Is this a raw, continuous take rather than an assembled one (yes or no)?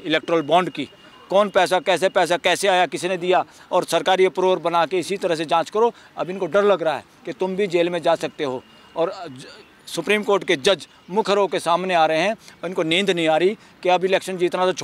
yes